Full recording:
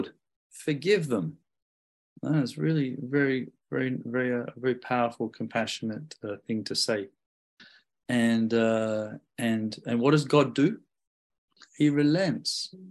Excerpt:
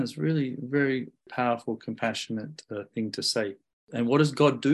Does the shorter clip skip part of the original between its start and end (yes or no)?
yes